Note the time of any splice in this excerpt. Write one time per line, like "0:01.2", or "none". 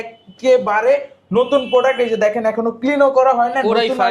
none